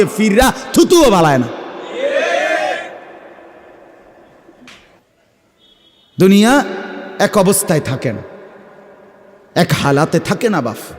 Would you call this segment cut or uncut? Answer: cut